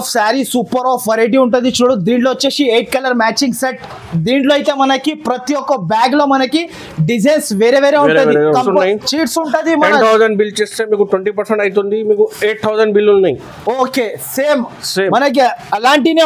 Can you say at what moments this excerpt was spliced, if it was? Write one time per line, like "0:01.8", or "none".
0:08.6